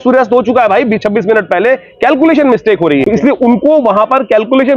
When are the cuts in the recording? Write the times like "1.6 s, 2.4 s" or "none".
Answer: 3.1 s